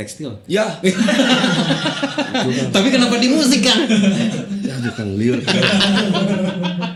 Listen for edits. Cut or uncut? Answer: uncut